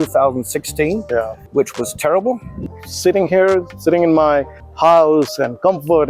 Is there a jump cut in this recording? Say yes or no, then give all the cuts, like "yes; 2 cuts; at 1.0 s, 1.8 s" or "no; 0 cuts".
yes; 2 cuts; at 1.4 s, 2.6 s